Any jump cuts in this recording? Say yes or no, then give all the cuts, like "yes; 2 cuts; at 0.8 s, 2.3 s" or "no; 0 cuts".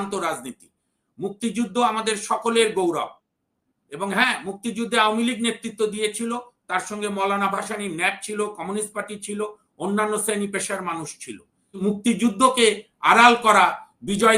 yes; 1 cut; at 11.8 s